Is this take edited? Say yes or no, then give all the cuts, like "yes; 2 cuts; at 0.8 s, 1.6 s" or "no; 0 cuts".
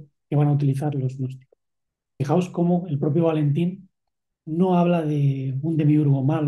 yes; 1 cut; at 2.2 s